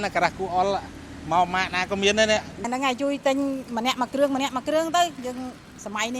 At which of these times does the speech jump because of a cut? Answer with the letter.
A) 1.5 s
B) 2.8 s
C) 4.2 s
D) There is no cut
B